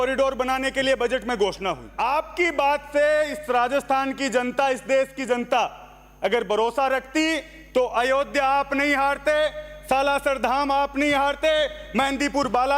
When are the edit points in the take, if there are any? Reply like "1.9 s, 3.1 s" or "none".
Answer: 1.8 s